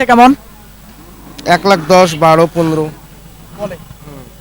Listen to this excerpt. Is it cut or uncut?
uncut